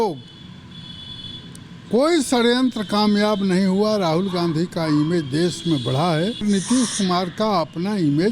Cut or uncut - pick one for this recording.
cut